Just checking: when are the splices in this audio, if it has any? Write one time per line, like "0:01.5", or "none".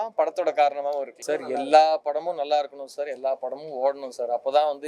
0:01.2